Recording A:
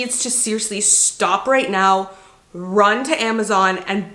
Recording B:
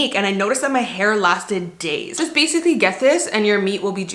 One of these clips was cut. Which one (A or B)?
B